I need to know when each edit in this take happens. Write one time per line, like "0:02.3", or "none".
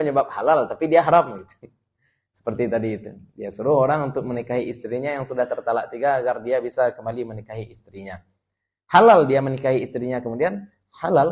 none